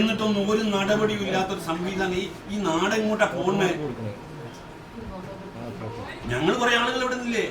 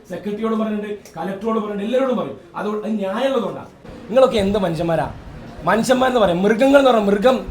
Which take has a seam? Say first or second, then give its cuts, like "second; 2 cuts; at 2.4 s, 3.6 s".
second; 1 cut; at 3.9 s